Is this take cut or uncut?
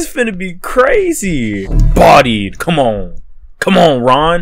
cut